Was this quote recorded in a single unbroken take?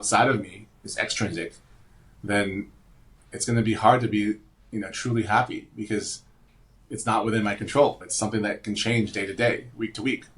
yes; 0 cuts

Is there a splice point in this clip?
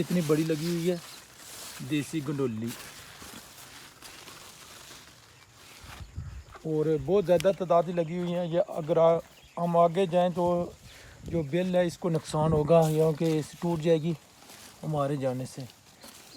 no; 0 cuts

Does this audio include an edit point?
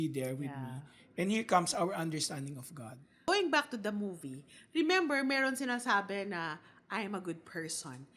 yes; 1 cut; at 3.3 s

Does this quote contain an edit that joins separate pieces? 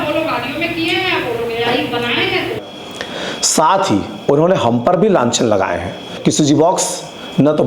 yes; 2 cuts; at 2.6 s, 6.1 s

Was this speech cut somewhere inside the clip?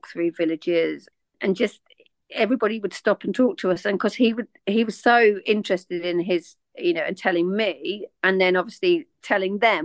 yes; 1 cut; at 1.3 s

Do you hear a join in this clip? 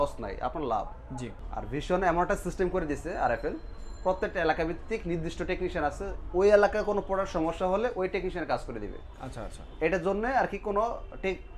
yes; 1 cut; at 1.4 s

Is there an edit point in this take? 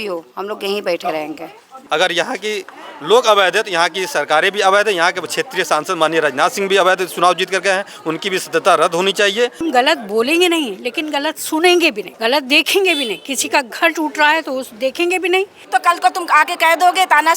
yes; 4 cuts; at 1.7 s, 9.6 s, 12.1 s, 15.6 s

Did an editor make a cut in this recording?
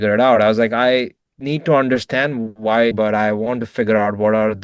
yes; 1 cut; at 2.9 s

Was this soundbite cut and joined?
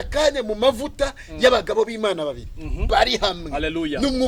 no; 0 cuts

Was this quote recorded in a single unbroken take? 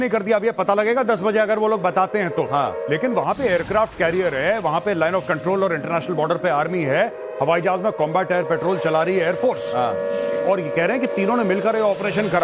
yes; 0 cuts

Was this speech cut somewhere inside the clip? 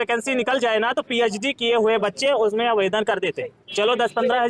no; 0 cuts

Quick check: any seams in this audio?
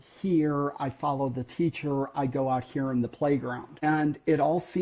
yes; 1 cut; at 3.8 s

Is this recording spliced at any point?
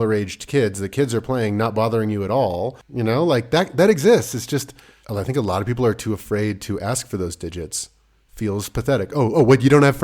yes; 1 cut; at 2.9 s

